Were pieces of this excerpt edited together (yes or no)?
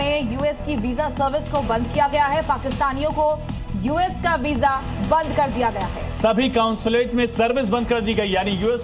no